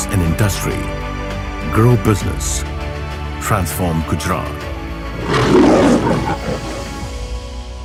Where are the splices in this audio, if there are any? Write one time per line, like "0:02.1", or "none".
none